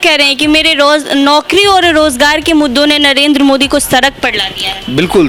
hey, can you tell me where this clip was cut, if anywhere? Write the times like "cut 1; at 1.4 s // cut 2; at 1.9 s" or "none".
none